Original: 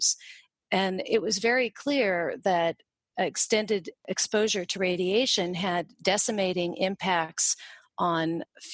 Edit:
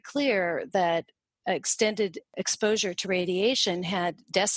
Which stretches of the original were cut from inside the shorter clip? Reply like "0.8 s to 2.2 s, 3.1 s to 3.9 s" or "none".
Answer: none